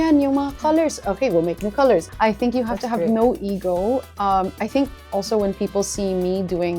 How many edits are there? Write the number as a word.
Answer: one